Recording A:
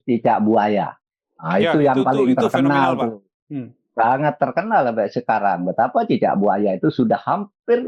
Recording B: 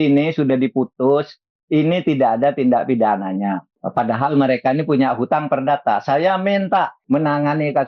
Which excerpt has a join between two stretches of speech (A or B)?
B